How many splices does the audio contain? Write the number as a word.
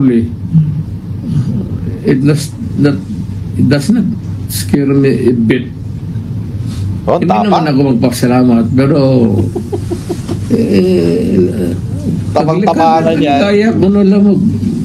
zero